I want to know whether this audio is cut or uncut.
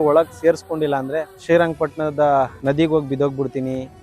cut